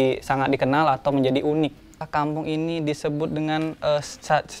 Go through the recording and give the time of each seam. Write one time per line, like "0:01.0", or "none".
0:01.9